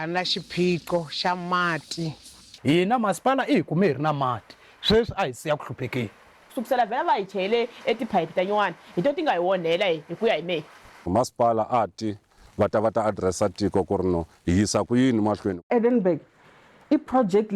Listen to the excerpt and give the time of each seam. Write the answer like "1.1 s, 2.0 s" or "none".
2.5 s, 6.5 s, 11.1 s, 12.4 s, 15.6 s